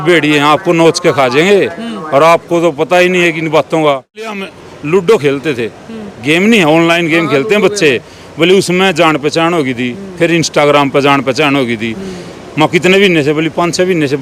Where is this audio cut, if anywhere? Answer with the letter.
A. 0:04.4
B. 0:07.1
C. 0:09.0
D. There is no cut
A